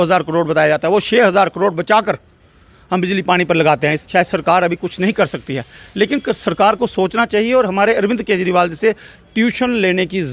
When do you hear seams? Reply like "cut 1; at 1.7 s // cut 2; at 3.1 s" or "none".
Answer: cut 1; at 4.0 s